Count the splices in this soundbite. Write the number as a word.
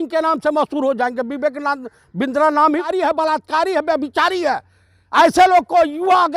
one